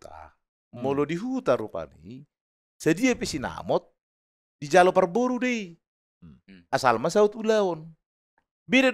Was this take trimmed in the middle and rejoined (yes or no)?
no